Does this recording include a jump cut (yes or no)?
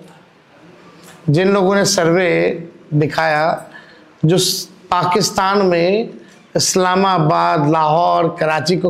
no